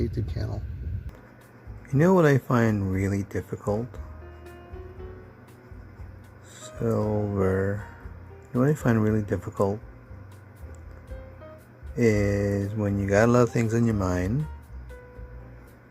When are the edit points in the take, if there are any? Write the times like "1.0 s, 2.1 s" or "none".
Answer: 1.1 s